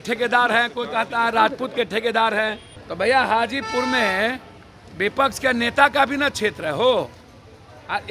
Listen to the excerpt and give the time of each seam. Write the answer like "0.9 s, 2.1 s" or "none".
2.7 s

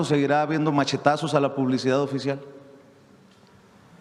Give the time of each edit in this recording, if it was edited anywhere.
none

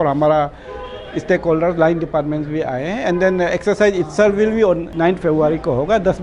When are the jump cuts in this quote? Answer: 4.9 s

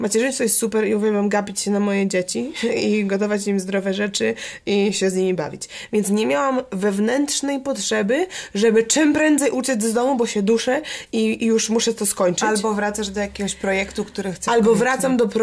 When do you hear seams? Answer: none

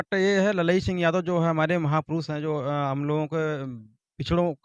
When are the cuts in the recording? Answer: none

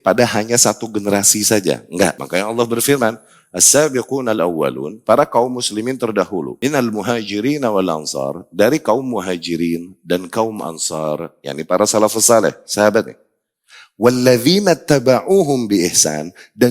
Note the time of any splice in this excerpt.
2.2 s, 6.5 s

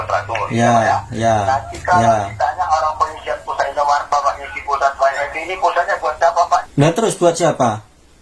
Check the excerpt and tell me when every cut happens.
6.7 s

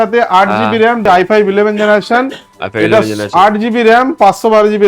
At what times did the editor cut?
1.0 s

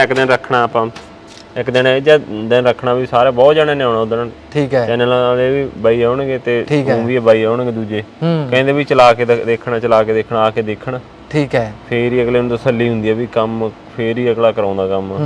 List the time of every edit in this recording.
none

